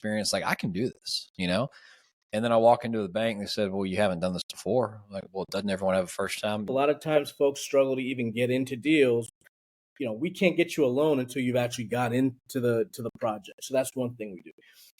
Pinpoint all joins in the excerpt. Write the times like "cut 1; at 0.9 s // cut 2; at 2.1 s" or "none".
cut 1; at 6.7 s